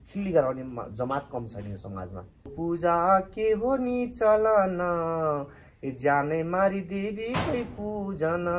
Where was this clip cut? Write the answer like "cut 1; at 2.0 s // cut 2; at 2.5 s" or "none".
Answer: cut 1; at 2.5 s